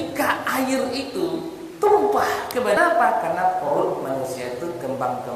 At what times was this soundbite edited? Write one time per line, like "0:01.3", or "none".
0:02.8